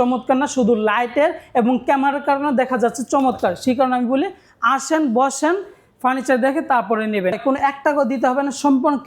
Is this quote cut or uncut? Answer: cut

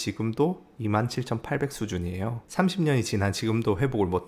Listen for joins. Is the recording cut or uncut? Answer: uncut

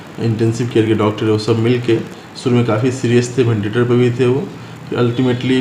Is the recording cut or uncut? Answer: uncut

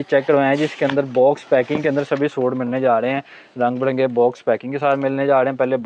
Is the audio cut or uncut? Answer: uncut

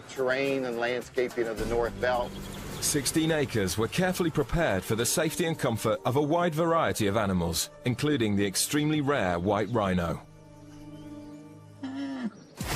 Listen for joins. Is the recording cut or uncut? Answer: cut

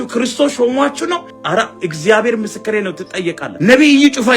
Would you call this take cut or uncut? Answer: cut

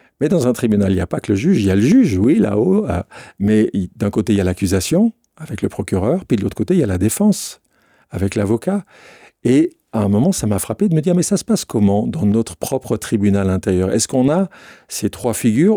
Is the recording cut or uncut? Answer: uncut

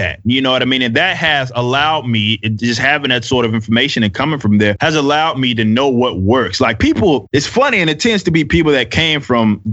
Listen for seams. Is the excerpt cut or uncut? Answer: cut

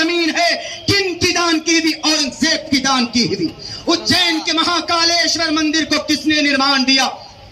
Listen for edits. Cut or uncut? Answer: uncut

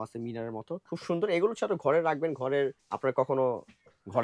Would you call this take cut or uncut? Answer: cut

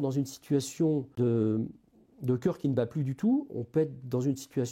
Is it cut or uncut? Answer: cut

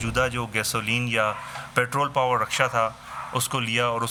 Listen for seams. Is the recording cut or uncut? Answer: uncut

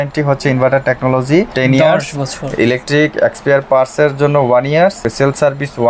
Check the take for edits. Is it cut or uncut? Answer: cut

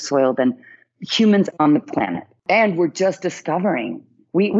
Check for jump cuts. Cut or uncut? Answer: cut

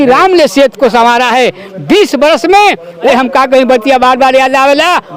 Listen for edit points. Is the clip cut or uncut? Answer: cut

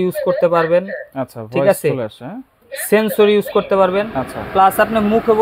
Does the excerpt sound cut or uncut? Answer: uncut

